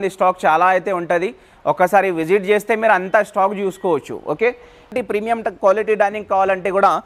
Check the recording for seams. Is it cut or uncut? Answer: cut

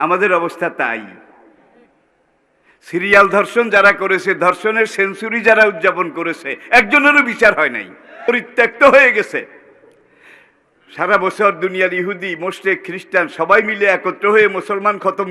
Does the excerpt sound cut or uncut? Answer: cut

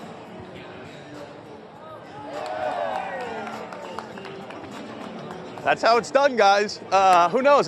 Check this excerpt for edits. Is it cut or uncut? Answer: uncut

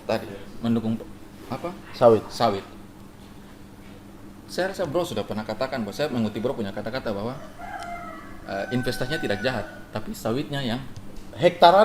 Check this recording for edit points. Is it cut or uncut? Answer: uncut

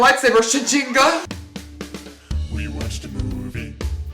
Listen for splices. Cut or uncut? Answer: cut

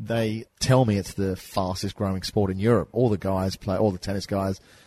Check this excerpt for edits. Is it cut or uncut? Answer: cut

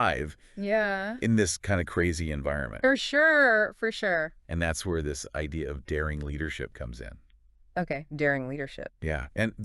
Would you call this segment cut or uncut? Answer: cut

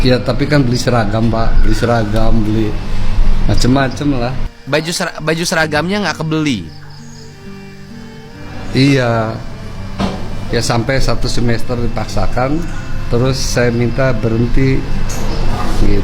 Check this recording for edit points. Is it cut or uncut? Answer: uncut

